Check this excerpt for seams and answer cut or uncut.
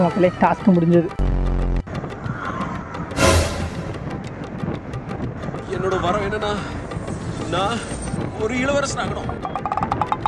cut